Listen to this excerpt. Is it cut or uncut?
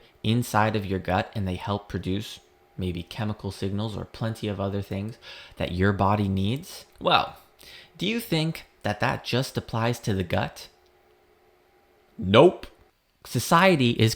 cut